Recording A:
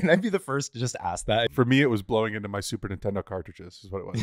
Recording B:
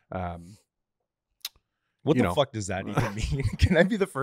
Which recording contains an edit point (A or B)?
A